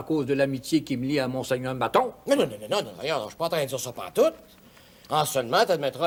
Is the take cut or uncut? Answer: uncut